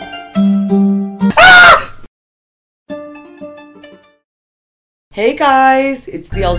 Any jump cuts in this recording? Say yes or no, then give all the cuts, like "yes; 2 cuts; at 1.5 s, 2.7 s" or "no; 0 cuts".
yes; 1 cut; at 1.3 s